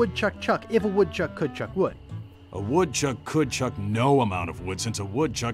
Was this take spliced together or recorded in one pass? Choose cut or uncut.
uncut